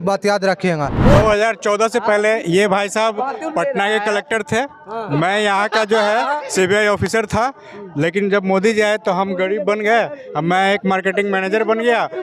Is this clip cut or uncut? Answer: cut